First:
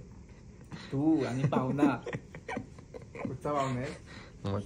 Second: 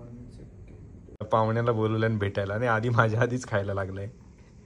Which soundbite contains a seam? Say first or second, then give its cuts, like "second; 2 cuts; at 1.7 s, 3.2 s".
second; 1 cut; at 1.2 s